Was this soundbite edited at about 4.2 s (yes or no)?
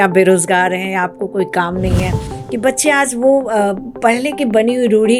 no